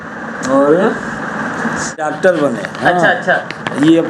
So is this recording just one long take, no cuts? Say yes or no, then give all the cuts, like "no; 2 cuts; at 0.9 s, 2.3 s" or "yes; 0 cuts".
no; 1 cut; at 2.0 s